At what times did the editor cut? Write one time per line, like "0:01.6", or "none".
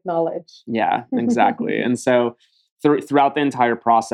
none